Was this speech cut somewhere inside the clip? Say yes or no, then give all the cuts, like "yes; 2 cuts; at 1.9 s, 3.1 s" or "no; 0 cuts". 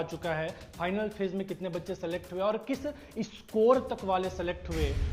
no; 0 cuts